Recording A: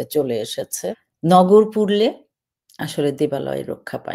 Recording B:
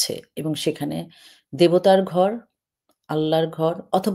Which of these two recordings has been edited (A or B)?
A